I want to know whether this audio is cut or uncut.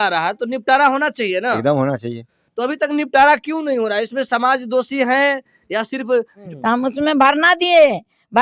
cut